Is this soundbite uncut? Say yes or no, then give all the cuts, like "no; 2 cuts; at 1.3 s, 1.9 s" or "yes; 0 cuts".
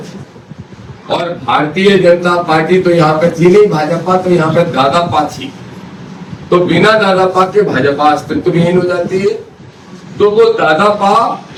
yes; 0 cuts